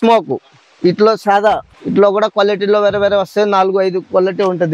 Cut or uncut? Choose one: cut